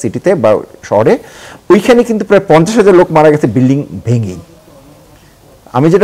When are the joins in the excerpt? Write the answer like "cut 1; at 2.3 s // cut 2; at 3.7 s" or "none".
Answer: none